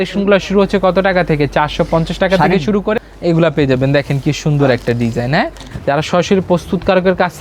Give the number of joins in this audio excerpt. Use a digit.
2